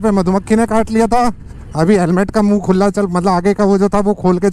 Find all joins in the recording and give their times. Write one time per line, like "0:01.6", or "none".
none